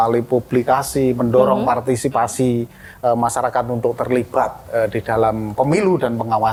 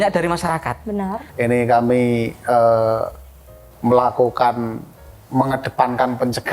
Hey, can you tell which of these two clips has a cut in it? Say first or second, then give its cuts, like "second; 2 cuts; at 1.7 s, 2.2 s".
second; 1 cut; at 1.3 s